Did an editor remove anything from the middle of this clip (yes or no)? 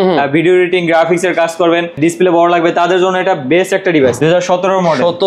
yes